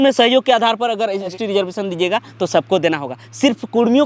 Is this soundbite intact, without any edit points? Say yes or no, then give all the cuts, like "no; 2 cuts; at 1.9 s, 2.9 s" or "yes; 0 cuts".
no; 1 cut; at 1.3 s